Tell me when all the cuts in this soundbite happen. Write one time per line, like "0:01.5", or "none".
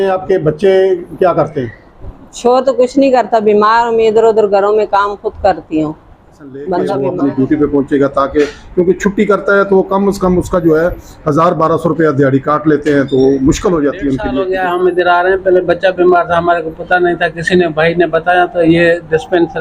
0:07.1
0:14.3